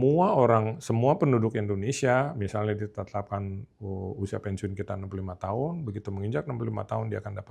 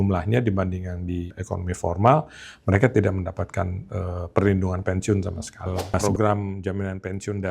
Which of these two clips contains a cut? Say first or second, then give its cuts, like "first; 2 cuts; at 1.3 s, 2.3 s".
second; 2 cuts; at 1.4 s, 6.0 s